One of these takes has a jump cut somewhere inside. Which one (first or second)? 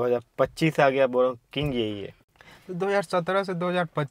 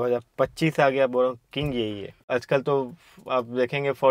second